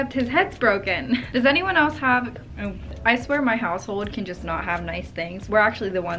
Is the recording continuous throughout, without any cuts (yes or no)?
yes